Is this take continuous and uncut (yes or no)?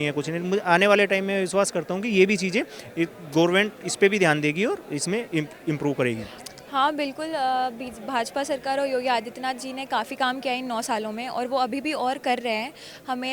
no